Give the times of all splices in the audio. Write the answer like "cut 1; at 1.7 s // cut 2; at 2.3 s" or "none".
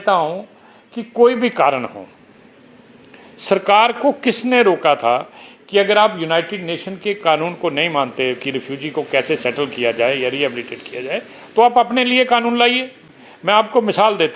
none